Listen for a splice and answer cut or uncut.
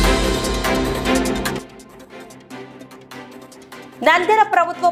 uncut